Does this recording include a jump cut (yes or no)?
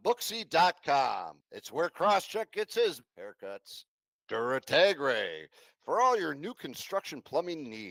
no